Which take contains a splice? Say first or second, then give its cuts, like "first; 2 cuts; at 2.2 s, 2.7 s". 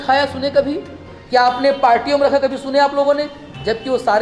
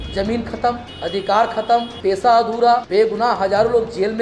second; 3 cuts; at 0.9 s, 1.9 s, 2.9 s